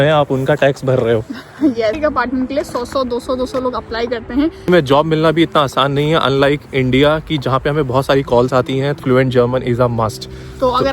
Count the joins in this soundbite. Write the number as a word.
three